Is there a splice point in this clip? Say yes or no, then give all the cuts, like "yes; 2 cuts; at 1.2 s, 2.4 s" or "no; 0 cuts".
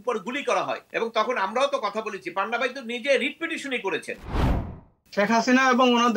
yes; 2 cuts; at 0.8 s, 4.4 s